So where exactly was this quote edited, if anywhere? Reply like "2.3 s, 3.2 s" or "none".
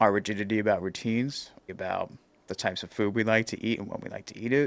1.6 s